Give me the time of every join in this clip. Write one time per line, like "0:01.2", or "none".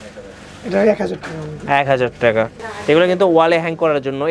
0:02.6

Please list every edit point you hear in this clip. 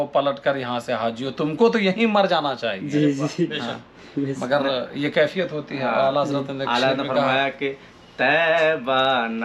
none

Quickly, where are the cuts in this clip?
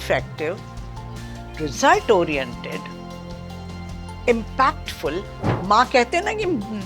0:05.6

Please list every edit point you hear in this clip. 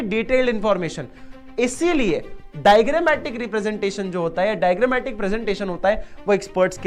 none

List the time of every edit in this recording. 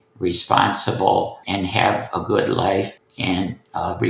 0:01.4
0:03.0

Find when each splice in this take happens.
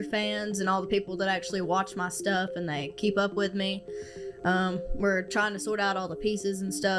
0:01.7

